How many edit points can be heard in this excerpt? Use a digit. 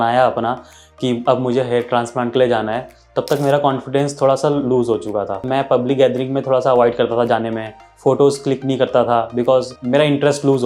2